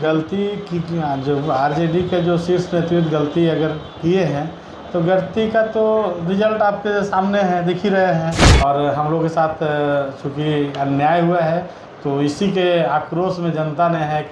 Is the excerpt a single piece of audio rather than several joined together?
no; 1 cut; at 8.5 s

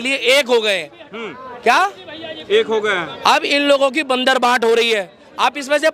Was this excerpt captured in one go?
yes; 0 cuts

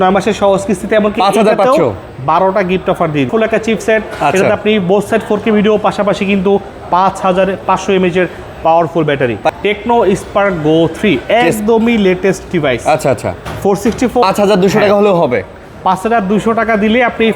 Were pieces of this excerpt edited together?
yes; 3 cuts; at 3.3 s, 9.5 s, 14.2 s

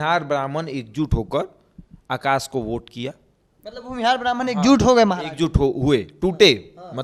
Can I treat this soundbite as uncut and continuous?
yes; 0 cuts

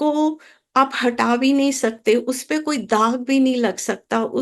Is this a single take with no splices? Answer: yes; 0 cuts

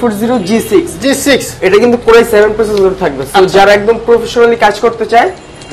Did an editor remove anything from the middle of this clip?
no; 0 cuts

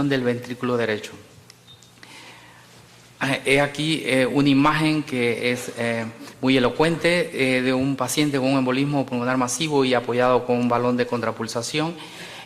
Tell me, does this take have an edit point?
no; 0 cuts

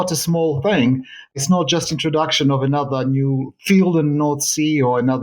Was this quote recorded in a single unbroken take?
no; 1 cut; at 1.3 s

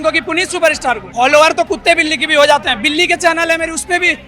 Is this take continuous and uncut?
no; 1 cut; at 1.0 s

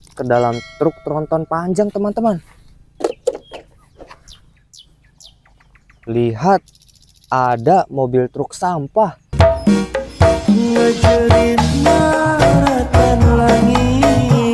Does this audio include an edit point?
no; 0 cuts

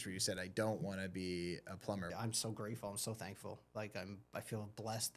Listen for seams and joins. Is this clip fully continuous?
no; 1 cut; at 2.1 s

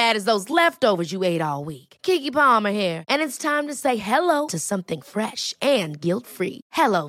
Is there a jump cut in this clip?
no; 0 cuts

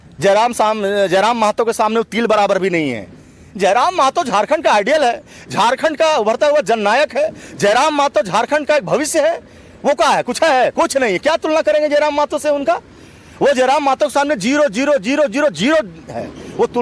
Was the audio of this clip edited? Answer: no; 0 cuts

